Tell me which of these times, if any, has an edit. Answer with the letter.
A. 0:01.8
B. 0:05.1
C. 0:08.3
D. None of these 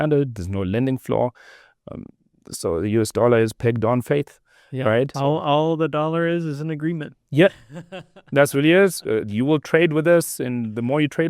B